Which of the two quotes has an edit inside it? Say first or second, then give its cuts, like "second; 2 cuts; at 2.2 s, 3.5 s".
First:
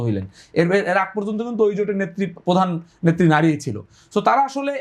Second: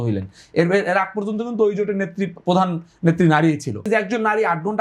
second; 1 cut; at 3.8 s